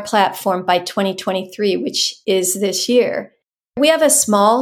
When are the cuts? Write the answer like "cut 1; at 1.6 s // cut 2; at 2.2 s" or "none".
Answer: cut 1; at 2.1 s // cut 2; at 3.8 s